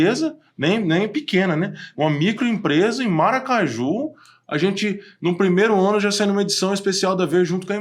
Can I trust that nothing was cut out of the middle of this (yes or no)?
yes